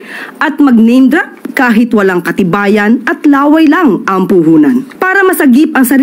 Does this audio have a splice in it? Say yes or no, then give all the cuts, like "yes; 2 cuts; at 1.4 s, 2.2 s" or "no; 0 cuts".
yes; 1 cut; at 5.0 s